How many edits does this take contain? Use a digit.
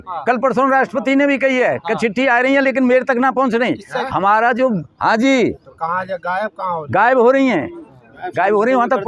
0